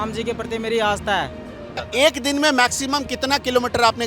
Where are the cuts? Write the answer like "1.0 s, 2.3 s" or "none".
1.8 s